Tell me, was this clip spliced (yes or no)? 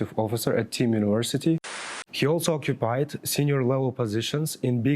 yes